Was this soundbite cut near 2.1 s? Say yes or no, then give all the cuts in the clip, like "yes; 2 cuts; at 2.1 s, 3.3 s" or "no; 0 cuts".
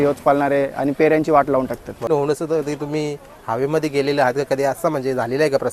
yes; 1 cut; at 2.1 s